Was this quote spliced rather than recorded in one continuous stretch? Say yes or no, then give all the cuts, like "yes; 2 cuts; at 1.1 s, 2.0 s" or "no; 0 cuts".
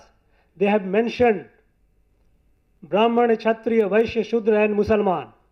no; 0 cuts